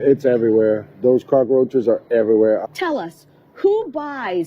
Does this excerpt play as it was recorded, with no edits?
no; 1 cut; at 2.6 s

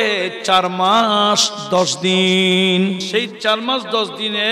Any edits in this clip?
yes; 1 cut; at 3.0 s

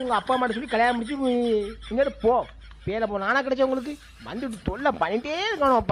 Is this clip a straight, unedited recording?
yes; 0 cuts

